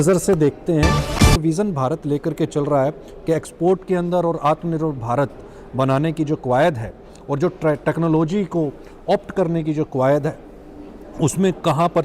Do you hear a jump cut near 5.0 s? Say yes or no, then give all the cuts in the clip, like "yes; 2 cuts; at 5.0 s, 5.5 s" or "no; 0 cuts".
no; 1 cut; at 1.4 s